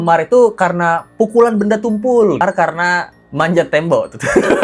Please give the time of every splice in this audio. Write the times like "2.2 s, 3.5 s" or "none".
2.4 s